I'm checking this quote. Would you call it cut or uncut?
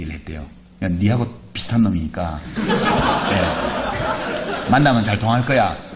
uncut